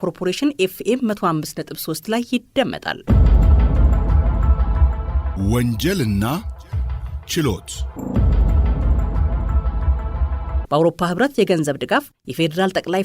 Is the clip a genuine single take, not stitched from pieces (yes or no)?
no